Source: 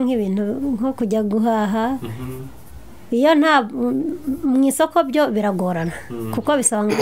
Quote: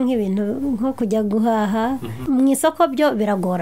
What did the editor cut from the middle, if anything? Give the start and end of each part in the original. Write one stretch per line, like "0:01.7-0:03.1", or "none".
0:02.2-0:04.3